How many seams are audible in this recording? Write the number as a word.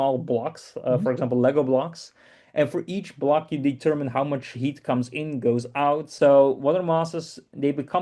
one